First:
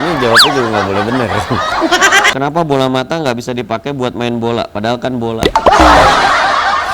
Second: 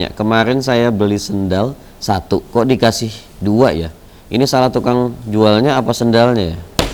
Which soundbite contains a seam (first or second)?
first